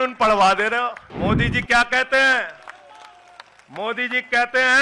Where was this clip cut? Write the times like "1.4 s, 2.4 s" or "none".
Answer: 1.0 s